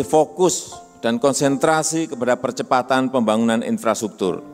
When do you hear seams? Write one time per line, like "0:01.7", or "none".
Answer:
none